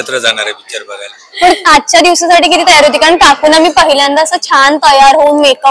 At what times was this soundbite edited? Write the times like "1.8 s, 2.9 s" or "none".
none